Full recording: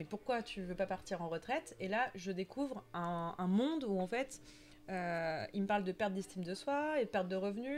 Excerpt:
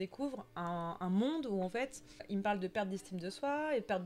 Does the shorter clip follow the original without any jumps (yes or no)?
no